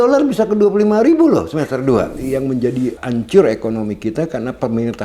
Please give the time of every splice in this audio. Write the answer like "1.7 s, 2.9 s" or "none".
2.2 s, 3.0 s